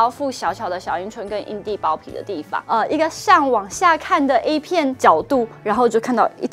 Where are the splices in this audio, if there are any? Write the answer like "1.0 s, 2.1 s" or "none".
2.5 s, 4.9 s